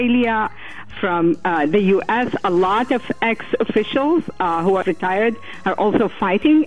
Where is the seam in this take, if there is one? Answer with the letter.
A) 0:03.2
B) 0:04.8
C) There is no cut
B